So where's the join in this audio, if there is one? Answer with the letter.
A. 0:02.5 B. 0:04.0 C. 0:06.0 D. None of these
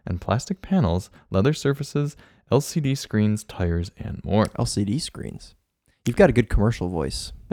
D